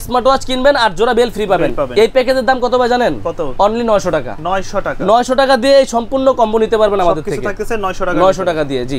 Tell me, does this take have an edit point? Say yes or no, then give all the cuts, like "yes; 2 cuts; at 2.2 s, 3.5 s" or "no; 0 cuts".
no; 0 cuts